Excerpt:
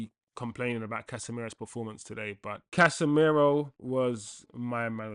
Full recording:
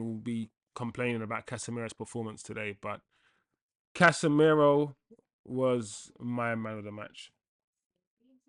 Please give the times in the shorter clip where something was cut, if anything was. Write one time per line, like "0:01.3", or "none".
0:02.6
0:03.8